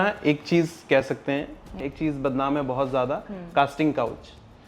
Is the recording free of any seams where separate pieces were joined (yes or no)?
no